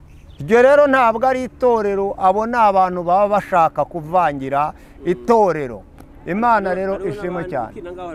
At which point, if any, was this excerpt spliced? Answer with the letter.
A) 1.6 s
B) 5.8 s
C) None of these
C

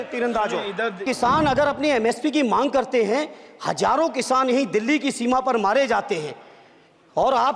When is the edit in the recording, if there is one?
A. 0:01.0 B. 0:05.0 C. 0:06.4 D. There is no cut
A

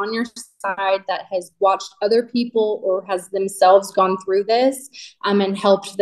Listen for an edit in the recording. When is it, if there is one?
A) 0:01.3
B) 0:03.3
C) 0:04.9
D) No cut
D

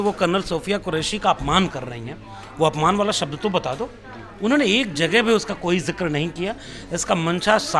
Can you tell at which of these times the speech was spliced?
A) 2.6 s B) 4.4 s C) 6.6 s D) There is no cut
D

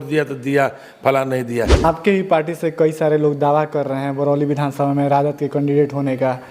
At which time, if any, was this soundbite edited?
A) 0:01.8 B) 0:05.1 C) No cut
A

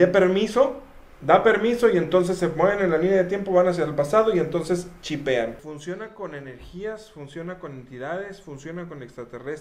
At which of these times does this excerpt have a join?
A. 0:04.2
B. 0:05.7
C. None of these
B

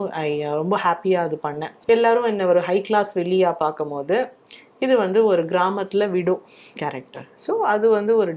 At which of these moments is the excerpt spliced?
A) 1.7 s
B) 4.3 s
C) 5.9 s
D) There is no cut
A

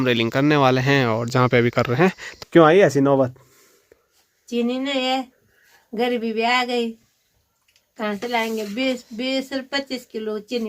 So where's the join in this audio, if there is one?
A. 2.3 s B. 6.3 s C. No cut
A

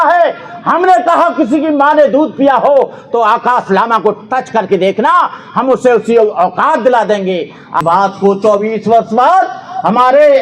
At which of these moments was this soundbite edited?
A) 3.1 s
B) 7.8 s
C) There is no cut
B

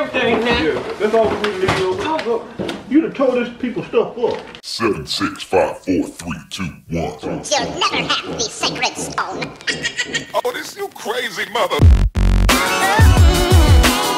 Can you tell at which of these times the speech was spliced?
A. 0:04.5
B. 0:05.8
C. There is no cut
A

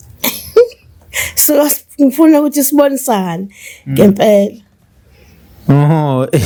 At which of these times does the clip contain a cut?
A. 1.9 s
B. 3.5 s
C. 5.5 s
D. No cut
D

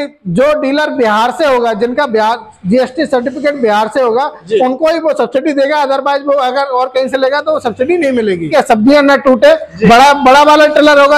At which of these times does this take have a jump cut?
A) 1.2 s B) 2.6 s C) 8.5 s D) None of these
C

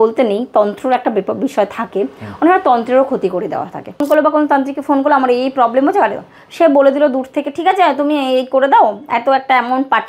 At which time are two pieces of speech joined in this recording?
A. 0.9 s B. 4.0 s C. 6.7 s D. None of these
B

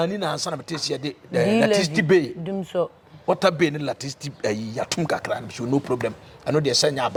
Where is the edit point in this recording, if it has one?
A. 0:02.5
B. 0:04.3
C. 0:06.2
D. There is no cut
D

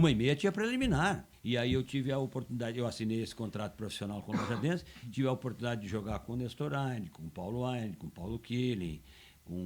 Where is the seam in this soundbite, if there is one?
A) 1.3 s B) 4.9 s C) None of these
A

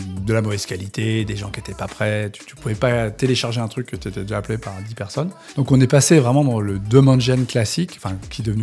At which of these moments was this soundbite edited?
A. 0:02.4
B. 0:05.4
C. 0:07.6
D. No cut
B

